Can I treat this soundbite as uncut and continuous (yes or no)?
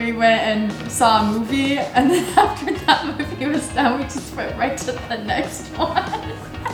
yes